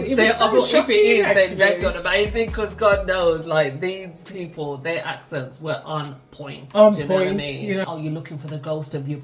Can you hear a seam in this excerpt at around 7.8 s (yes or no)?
yes